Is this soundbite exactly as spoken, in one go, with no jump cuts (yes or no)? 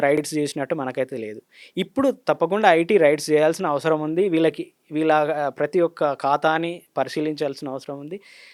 yes